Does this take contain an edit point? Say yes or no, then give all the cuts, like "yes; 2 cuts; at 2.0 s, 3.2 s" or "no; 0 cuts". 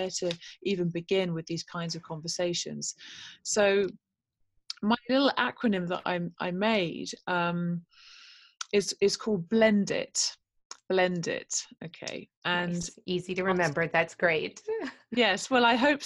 no; 0 cuts